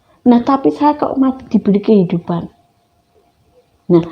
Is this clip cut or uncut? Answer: uncut